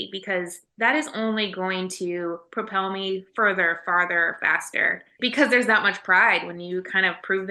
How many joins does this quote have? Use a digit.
0